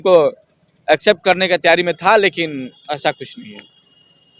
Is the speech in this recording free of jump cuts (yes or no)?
yes